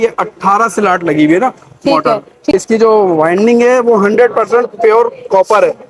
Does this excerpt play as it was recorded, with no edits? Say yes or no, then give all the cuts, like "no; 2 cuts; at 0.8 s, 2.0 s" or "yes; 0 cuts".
no; 1 cut; at 2.5 s